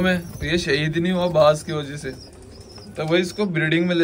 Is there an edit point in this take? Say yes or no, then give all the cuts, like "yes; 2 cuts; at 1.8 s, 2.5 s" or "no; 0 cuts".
no; 0 cuts